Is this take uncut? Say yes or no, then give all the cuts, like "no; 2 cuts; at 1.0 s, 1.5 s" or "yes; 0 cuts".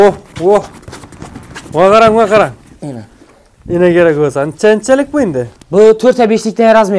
yes; 0 cuts